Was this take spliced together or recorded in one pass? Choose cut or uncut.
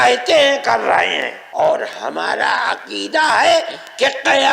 cut